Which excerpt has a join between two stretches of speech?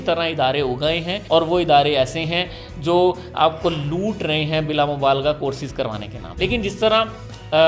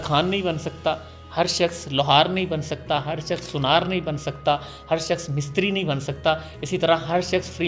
first; 2 cuts; at 1.1 s, 6.2 s

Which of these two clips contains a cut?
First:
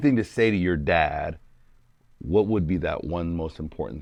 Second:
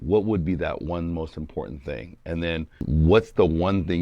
second; 1 cut; at 2.8 s

